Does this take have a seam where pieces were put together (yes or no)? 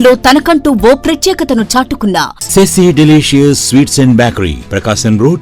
yes